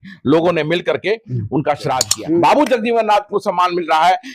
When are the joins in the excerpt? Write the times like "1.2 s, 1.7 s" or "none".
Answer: 2.1 s

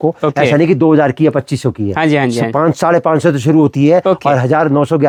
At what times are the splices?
none

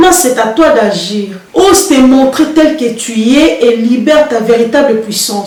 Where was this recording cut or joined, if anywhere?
none

